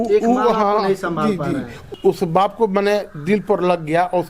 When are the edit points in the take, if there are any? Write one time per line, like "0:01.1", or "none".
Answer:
0:01.9

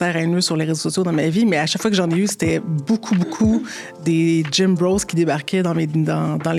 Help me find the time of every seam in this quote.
none

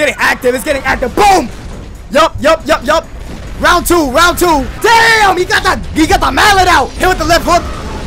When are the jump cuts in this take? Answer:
0:04.7
0:06.9

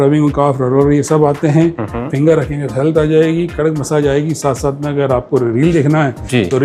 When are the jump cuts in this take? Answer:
none

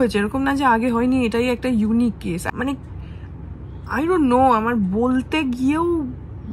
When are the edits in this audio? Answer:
0:02.4

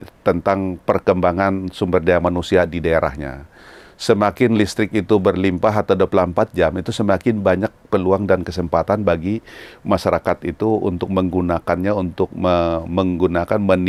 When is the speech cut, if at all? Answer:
none

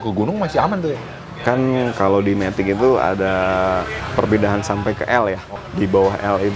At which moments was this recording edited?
0:01.1
0:04.0
0:05.5

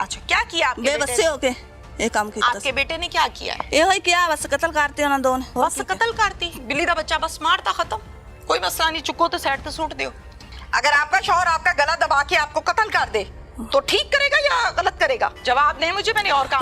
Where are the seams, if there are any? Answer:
0:03.5
0:05.5
0:10.5
0:15.4

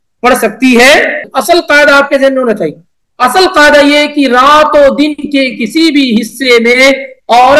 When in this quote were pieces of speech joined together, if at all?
0:01.3

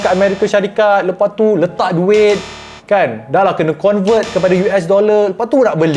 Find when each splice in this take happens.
none

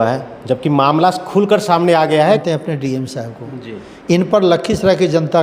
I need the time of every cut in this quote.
0:02.4

